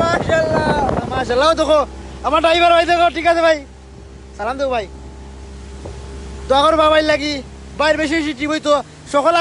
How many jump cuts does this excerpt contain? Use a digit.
1